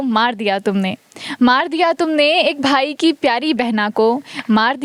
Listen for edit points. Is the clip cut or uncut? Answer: uncut